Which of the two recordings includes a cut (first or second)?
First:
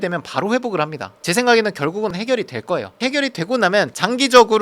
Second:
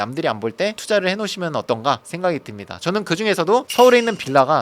first